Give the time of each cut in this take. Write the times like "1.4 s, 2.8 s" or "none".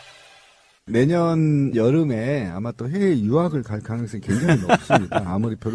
3.6 s